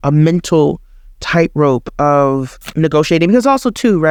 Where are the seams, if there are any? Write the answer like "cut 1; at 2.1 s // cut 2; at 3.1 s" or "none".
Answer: none